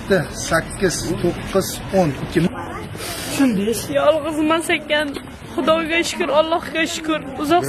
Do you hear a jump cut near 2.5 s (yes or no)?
yes